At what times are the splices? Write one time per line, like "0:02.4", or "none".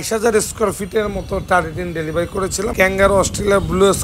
0:02.7